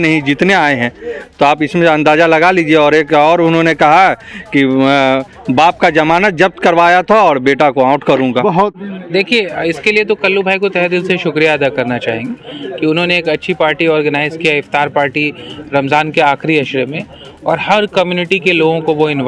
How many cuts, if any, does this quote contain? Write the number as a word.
one